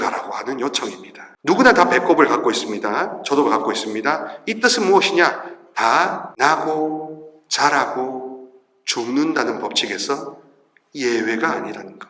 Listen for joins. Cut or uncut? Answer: cut